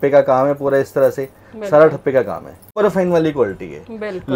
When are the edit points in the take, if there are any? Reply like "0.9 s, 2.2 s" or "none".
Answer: 2.8 s